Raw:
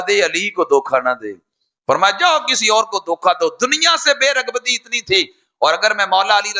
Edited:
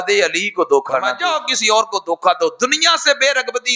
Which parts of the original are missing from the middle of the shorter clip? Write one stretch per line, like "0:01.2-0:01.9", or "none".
0:01.2-0:02.2